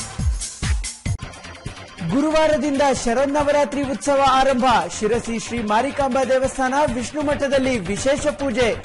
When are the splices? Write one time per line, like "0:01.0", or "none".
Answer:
0:01.1
0:01.8